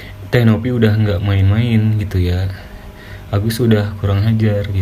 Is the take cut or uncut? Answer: uncut